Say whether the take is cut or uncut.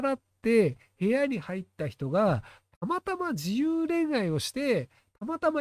uncut